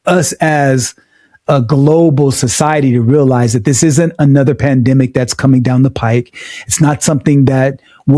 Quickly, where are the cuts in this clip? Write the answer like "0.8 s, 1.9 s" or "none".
none

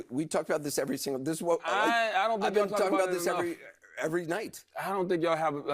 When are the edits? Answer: 2.6 s

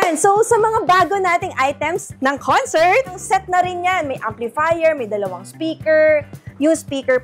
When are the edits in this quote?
2.1 s, 3.2 s

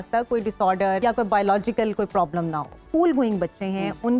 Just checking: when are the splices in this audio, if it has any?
1.0 s, 2.8 s

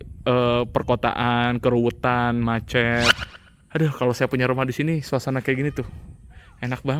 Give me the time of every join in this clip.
3.3 s

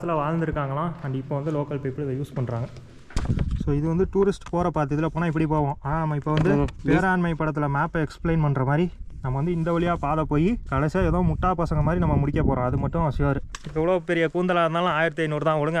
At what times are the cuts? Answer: 3.1 s, 6.8 s, 10.7 s, 13.6 s

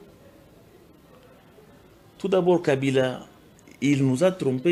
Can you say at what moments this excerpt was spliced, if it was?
none

